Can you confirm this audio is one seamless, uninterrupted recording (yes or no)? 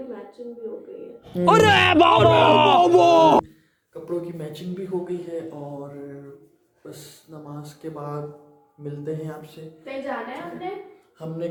yes